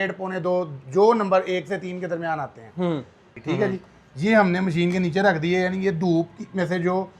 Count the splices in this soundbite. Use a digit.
1